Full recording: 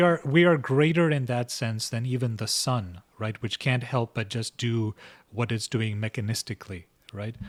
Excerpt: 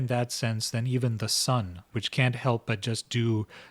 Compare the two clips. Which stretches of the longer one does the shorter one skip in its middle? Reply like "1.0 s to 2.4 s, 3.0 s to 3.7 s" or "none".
3.1 s to 3.4 s

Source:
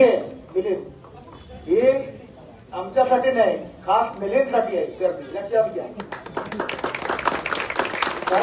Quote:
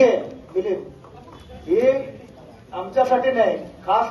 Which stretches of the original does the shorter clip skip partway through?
none

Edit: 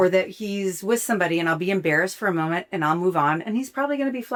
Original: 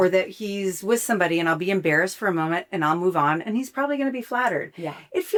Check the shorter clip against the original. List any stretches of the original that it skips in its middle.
none

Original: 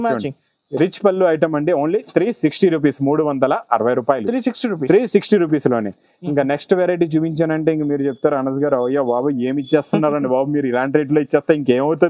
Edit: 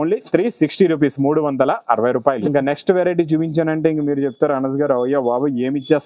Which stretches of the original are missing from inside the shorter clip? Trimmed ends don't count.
4.2 s to 6.2 s

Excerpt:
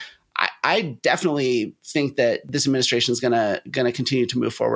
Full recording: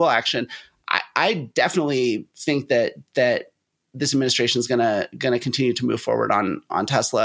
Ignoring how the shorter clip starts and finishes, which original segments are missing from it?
3.0 s to 4.0 s

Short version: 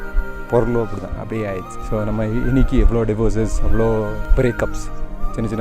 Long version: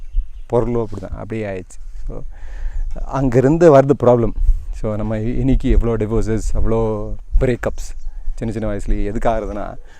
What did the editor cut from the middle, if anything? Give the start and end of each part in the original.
1.7 s to 4.6 s, 7.1 s to 7.3 s

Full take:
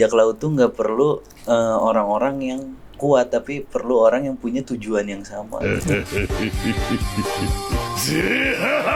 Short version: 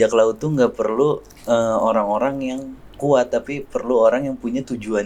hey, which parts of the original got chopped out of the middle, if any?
none

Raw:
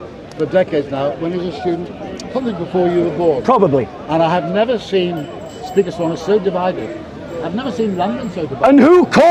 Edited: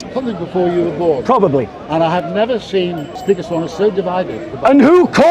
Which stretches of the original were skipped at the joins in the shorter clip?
5.3 s to 5.6 s, 7.0 s to 8.5 s

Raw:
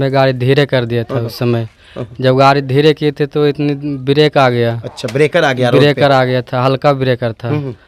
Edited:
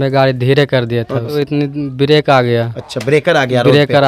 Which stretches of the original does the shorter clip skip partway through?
1.3 s to 3.4 s

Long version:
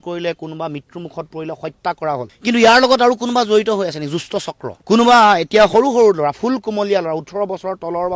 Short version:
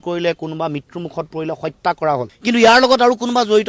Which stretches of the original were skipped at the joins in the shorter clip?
none

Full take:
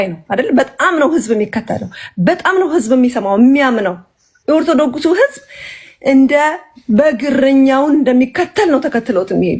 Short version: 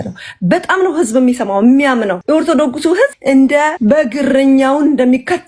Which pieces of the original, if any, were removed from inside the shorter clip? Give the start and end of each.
3.9 s to 4.4 s, 5.4 s to 6.0 s, 6.5 s to 6.8 s

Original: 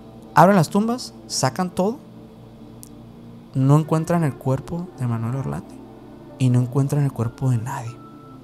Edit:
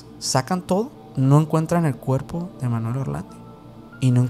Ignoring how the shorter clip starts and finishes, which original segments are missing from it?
2.1 s to 3.4 s

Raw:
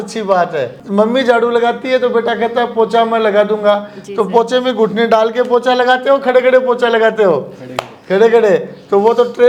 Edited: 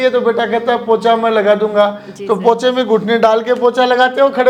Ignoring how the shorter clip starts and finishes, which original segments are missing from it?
none

